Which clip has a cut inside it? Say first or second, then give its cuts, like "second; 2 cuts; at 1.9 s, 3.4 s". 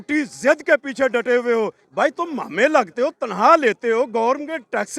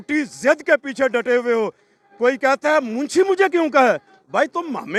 first; 1 cut; at 1.8 s